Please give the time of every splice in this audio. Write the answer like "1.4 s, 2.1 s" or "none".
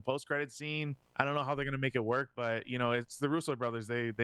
1.0 s